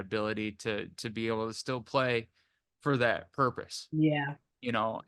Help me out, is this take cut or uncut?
uncut